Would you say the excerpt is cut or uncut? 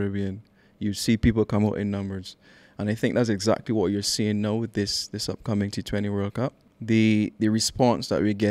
cut